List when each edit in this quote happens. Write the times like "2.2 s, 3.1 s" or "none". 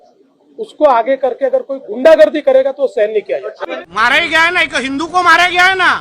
3.7 s

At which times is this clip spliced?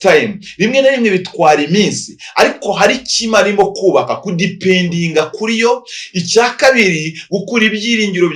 none

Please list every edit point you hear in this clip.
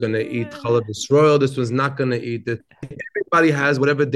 2.7 s

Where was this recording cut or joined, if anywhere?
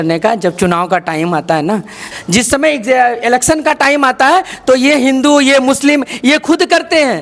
2.1 s

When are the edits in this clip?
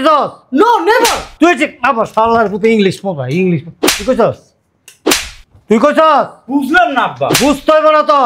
none

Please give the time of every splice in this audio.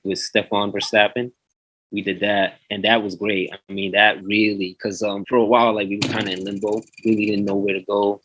5.2 s

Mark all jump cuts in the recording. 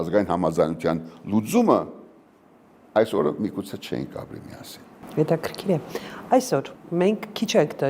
none

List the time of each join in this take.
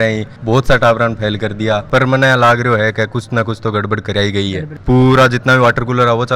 1.9 s, 4.7 s

